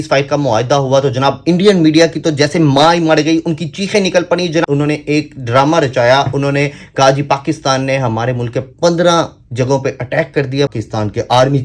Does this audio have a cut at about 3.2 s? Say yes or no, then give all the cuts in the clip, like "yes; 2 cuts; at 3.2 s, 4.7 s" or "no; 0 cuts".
no; 2 cuts; at 4.6 s, 10.7 s